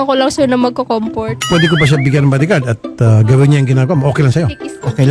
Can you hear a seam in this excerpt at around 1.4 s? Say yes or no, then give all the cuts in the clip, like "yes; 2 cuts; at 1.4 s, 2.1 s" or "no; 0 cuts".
yes; 1 cut; at 1.4 s